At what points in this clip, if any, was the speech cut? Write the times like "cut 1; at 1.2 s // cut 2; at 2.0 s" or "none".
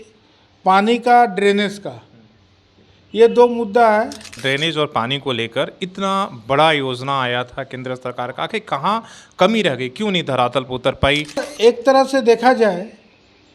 cut 1; at 4.3 s // cut 2; at 11.5 s